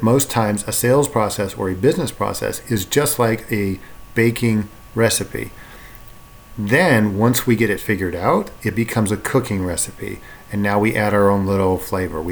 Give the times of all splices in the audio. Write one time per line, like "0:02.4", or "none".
none